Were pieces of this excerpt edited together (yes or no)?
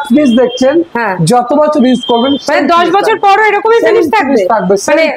no